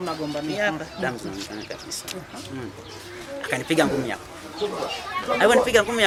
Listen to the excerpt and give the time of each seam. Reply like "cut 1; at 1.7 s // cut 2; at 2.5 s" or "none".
none